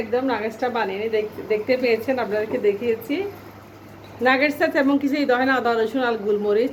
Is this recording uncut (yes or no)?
yes